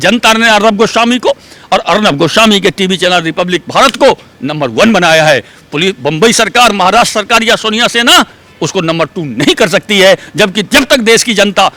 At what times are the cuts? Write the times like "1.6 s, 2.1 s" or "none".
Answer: none